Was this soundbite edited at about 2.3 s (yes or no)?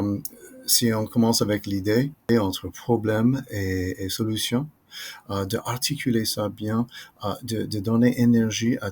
yes